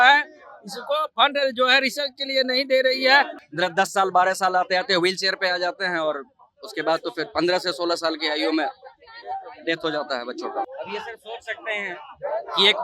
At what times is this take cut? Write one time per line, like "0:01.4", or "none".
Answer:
0:03.4
0:10.7